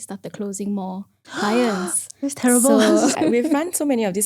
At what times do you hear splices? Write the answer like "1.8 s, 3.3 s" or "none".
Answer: 3.1 s